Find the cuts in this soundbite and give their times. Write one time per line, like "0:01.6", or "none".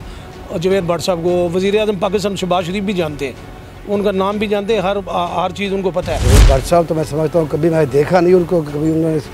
0:06.2